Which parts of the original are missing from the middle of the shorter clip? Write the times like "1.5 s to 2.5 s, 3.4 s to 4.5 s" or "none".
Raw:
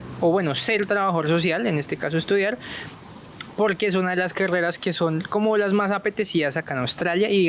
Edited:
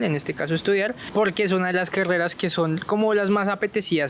2.6 s to 3.4 s